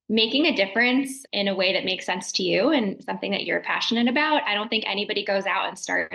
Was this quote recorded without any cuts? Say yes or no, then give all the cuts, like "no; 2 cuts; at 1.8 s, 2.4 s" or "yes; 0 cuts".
no; 1 cut; at 1.2 s